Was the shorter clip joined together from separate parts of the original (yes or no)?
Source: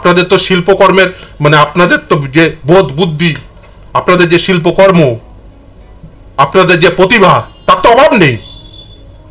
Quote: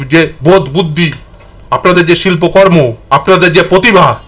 yes